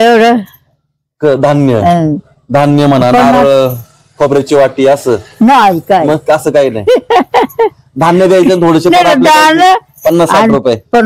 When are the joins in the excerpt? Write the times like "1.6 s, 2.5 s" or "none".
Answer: none